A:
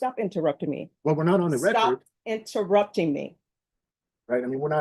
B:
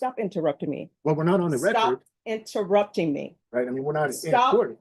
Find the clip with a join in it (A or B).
B